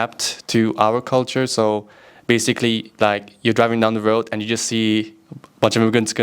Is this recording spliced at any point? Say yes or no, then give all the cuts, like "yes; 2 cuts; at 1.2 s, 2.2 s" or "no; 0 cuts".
no; 0 cuts